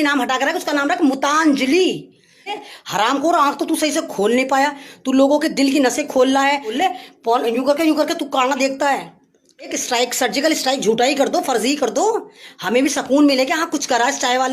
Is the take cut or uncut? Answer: cut